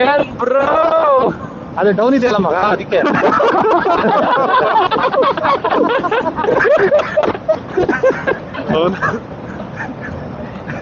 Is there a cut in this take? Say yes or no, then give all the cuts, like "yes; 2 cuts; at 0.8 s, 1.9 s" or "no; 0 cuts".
no; 0 cuts